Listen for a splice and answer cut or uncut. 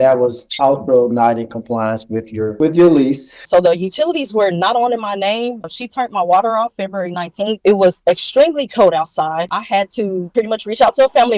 cut